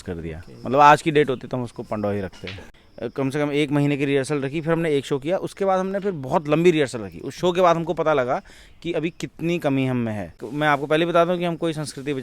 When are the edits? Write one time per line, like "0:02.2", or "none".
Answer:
0:02.8
0:10.4